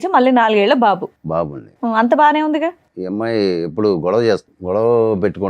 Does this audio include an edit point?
yes; 2 cuts; at 2.9 s, 4.5 s

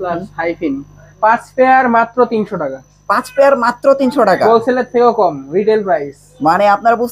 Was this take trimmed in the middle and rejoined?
yes; 1 cut; at 1.1 s

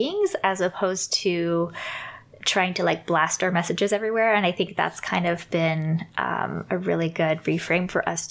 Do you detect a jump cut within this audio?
no; 0 cuts

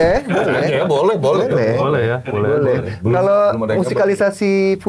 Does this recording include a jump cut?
no; 0 cuts

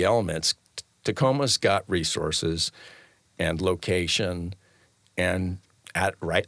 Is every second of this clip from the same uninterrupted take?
yes; 0 cuts

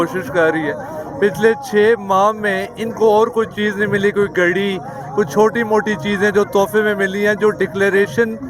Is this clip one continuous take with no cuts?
yes; 0 cuts

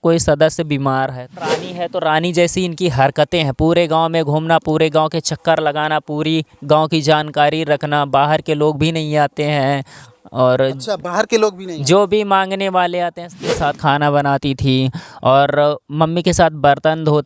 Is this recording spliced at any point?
yes; 2 cuts; at 1.6 s, 13.5 s

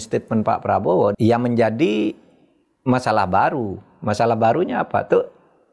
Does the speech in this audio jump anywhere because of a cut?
yes; 1 cut; at 1.1 s

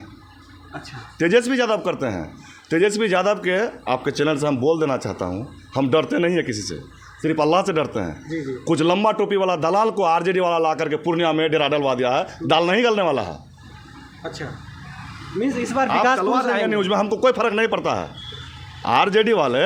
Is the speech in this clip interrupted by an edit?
no; 0 cuts

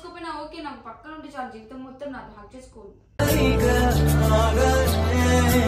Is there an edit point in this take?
no; 0 cuts

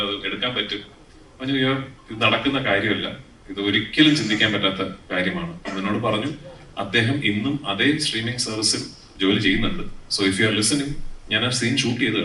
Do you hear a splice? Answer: no; 0 cuts

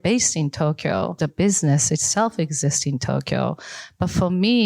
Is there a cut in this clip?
yes; 1 cut; at 1.2 s

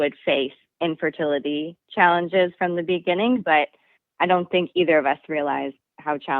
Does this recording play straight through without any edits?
no; 1 cut; at 3.4 s

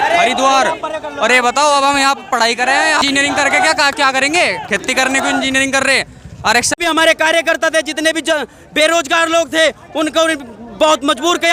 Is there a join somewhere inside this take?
yes; 2 cuts; at 3.0 s, 6.8 s

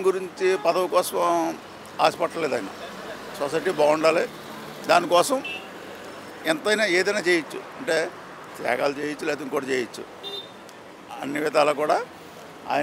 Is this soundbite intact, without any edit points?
yes; 0 cuts

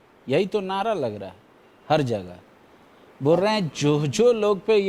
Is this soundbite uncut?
yes; 0 cuts

